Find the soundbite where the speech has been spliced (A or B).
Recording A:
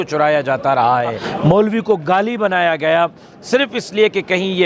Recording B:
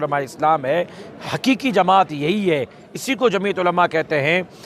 A